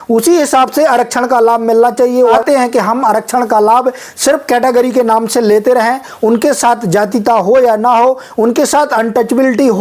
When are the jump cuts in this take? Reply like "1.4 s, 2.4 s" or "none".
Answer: 2.4 s

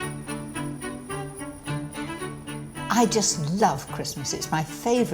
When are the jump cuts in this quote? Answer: 2.9 s

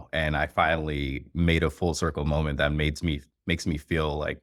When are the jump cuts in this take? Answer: none

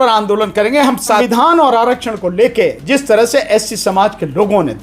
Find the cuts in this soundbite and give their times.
1.2 s

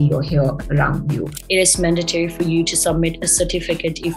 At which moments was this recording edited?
1.3 s

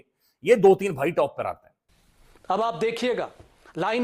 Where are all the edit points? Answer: 1.7 s

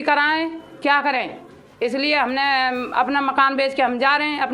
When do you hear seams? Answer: none

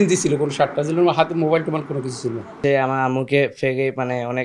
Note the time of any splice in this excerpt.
2.6 s

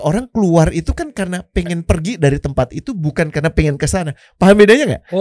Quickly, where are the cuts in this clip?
none

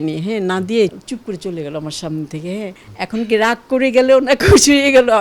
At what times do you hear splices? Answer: 1.0 s, 2.8 s

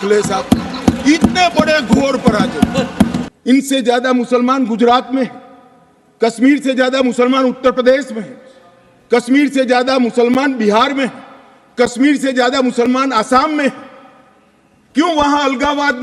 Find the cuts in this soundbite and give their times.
3.2 s

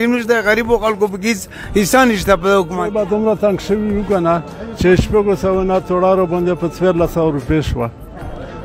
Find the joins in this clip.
3.0 s

